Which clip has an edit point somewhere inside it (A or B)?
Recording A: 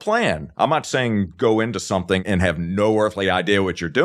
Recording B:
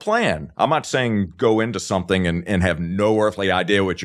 A